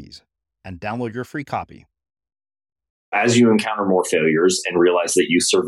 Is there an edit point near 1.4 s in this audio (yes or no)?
no